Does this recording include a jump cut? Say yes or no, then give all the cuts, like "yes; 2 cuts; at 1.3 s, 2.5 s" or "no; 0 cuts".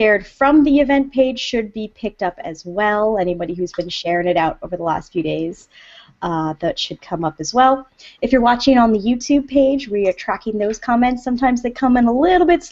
yes; 1 cut; at 8.1 s